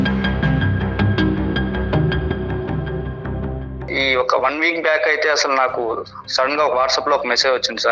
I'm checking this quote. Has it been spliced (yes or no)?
yes